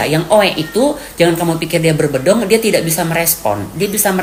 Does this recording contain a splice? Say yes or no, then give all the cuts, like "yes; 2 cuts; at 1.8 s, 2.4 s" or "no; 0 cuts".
no; 0 cuts